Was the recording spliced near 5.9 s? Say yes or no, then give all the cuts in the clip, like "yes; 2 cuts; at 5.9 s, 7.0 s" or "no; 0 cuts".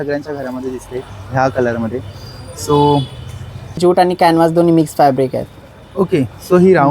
no; 1 cut; at 3.8 s